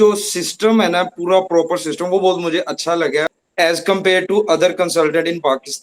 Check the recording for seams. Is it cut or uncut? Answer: cut